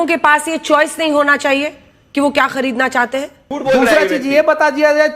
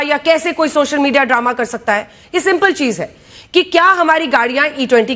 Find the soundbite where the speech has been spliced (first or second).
first